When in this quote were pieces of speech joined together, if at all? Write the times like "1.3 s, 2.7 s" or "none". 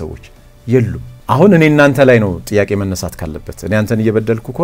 1.1 s